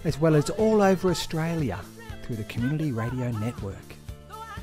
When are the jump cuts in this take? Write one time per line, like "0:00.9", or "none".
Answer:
0:03.7